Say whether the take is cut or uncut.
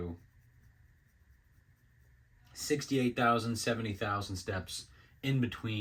uncut